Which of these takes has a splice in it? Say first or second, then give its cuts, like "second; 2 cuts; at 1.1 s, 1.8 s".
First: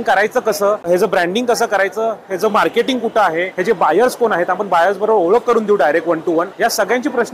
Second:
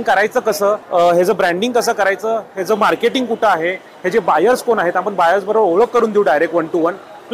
first; 3 cuts; at 0.9 s, 3.5 s, 6.5 s